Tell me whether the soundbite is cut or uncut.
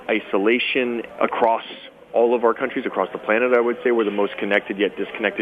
cut